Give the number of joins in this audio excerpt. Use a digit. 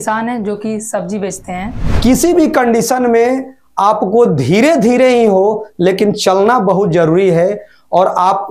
1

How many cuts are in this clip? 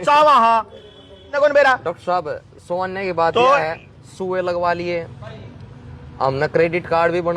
1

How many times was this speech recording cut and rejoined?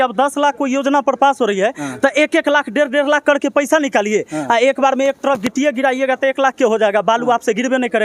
0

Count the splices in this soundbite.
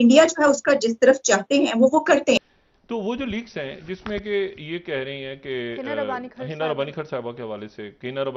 1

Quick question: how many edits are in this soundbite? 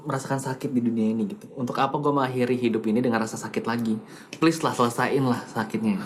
0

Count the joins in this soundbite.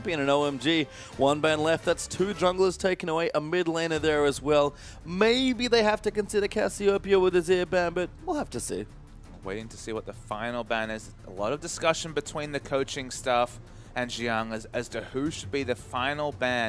1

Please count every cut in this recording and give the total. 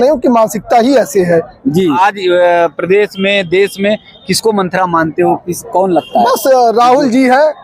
1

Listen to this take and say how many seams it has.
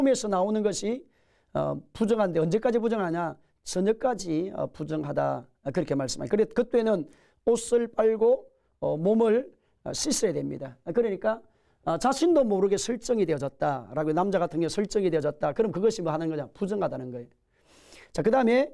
1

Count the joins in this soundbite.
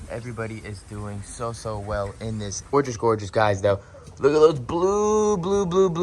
1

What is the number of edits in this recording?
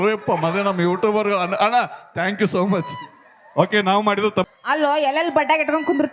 1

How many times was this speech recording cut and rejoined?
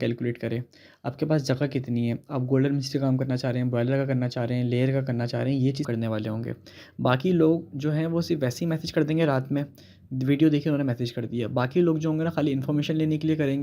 1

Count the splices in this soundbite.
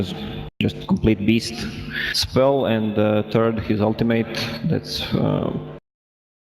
1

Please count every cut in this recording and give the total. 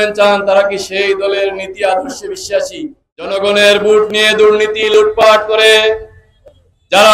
1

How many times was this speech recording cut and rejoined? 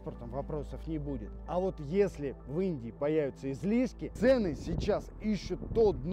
1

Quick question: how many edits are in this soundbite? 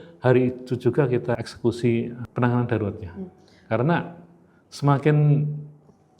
2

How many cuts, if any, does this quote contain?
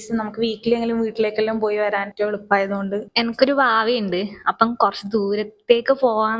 2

